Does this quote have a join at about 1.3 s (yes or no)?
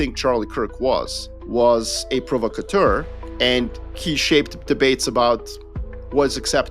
no